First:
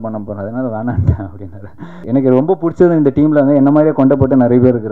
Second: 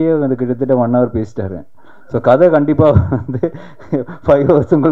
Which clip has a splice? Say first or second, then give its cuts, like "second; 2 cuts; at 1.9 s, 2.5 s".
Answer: first; 1 cut; at 1.9 s